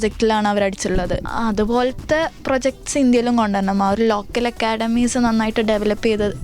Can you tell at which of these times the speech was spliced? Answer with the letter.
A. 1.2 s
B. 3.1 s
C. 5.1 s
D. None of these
A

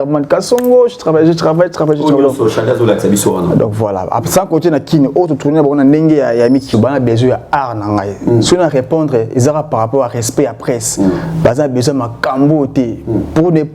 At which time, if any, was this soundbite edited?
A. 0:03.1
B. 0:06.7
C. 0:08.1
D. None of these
B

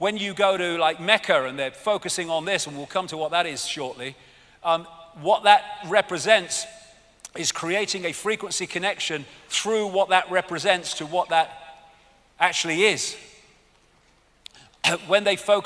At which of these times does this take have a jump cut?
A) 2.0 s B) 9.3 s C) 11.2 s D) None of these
D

